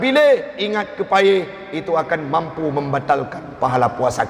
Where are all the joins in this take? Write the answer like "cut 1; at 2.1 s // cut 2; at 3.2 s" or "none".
none